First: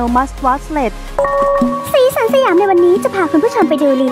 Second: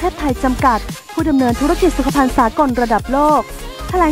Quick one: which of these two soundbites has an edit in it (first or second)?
first